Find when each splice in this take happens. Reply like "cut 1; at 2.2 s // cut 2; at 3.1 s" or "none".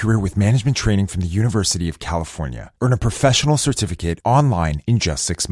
none